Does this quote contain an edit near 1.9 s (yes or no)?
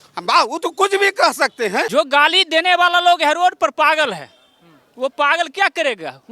yes